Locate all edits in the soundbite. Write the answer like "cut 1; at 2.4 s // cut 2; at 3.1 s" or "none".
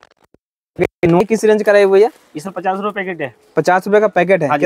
none